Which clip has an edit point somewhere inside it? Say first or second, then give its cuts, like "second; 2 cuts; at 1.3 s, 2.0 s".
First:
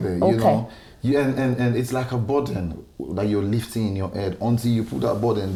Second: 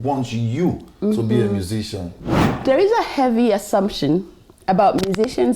second; 1 cut; at 2.2 s